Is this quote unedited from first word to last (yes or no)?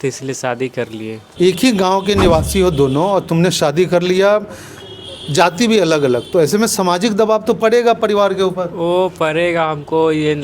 no